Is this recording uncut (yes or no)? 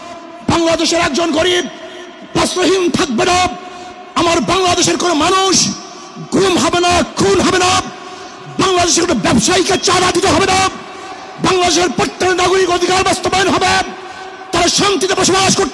yes